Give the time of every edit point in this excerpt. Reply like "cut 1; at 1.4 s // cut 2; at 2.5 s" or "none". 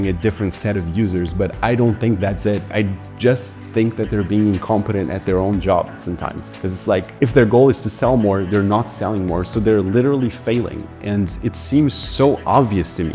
none